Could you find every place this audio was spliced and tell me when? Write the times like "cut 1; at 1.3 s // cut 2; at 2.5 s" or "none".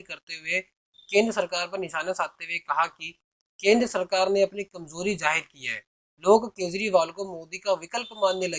none

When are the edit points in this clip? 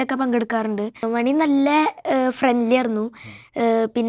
cut 1; at 1.0 s

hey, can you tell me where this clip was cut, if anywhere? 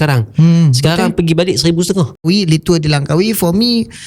cut 1; at 2.3 s

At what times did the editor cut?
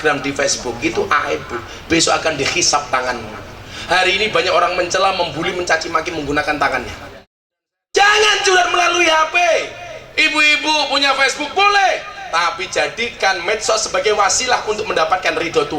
cut 1; at 7.5 s

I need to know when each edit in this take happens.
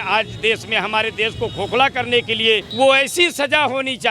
cut 1; at 2.7 s

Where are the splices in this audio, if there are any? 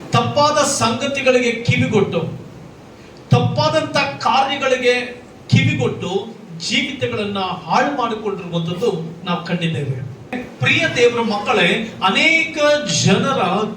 cut 1; at 10.5 s

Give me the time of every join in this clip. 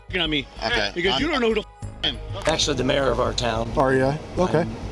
cut 1; at 2.5 s

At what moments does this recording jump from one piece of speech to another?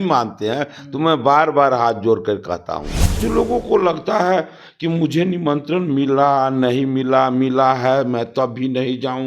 cut 1; at 3.2 s

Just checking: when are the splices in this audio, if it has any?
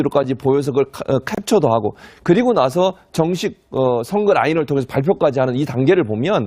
cut 1; at 3.7 s

